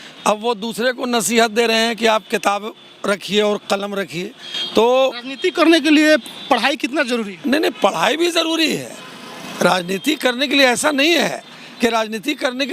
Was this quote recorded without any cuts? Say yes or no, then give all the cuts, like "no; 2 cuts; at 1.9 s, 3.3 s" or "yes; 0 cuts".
yes; 0 cuts